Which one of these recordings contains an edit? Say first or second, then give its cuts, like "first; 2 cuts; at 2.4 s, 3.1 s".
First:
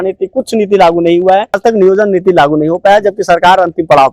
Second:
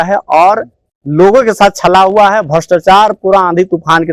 first; 1 cut; at 1.6 s